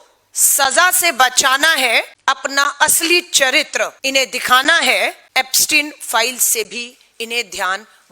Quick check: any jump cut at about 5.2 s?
yes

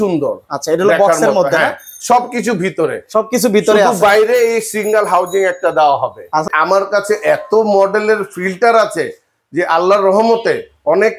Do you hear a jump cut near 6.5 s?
yes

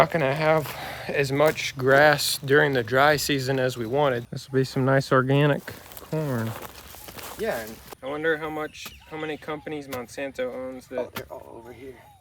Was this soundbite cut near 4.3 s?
yes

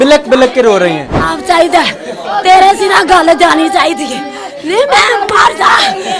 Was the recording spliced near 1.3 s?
yes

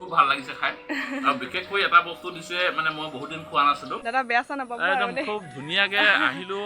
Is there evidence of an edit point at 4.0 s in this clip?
yes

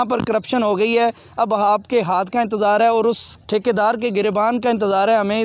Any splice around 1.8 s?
no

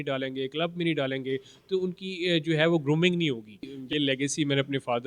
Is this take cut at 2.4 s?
no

